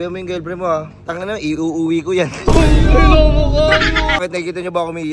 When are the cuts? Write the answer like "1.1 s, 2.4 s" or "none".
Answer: 4.2 s